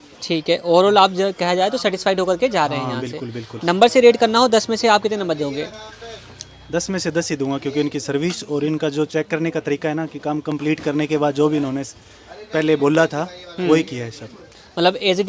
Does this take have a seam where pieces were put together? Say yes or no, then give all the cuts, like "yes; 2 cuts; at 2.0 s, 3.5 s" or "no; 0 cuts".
no; 0 cuts